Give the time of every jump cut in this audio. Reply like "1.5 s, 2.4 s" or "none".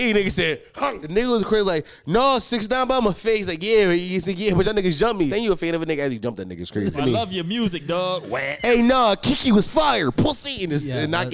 1.0 s, 5.3 s, 7.0 s, 8.5 s